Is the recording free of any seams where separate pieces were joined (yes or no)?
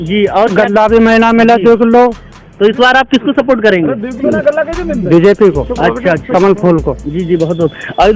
yes